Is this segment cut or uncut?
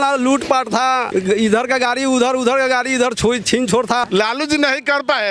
cut